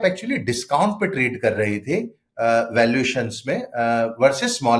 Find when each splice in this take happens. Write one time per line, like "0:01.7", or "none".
none

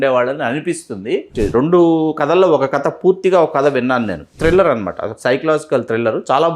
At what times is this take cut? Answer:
0:01.3
0:04.3

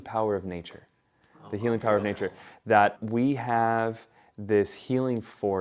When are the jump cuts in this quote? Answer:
0:02.9

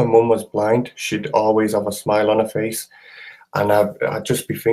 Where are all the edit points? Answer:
none

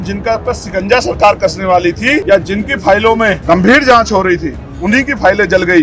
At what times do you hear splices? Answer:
0:02.2
0:03.4

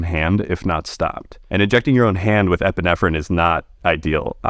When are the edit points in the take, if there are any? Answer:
0:01.3

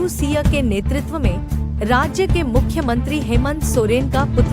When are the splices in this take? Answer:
none

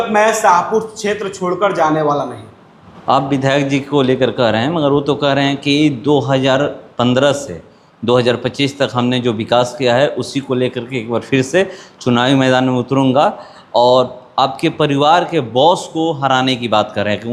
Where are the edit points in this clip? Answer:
none

